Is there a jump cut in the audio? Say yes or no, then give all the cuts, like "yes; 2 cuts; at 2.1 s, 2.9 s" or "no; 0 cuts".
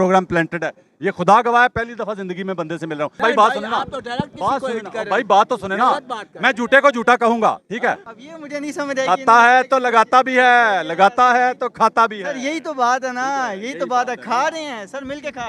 yes; 2 cuts; at 3.1 s, 8.0 s